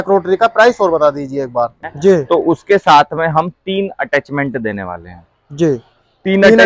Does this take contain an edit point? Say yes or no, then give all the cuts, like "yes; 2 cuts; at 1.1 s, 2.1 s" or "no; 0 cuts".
yes; 1 cut; at 1.9 s